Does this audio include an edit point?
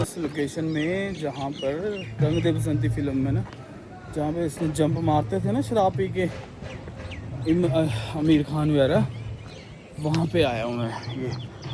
no; 0 cuts

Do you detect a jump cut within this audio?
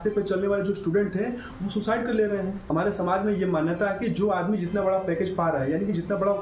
yes; 1 cut; at 2.6 s

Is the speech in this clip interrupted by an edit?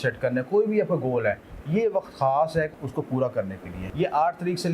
yes; 2 cuts; at 2.7 s, 3.8 s

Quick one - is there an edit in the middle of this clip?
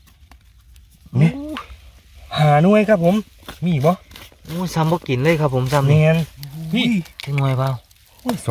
yes; 1 cut; at 6.8 s

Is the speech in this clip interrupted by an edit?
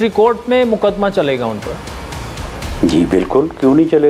no; 0 cuts

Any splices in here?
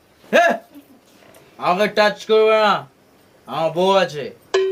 no; 0 cuts

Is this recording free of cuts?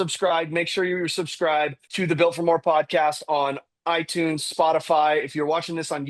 no; 1 cut; at 1.8 s

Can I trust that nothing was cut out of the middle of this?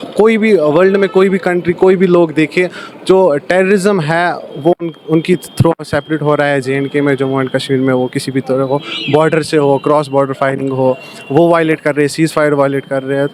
yes; 0 cuts

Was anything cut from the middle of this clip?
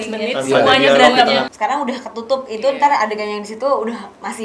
yes; 1 cut; at 1.5 s

